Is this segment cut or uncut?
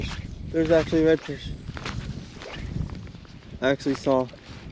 uncut